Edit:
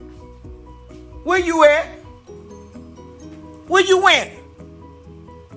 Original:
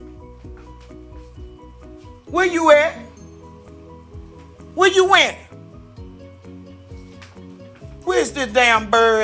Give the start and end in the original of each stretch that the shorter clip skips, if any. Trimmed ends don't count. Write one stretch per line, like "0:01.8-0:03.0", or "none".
0:01.2-0:02.3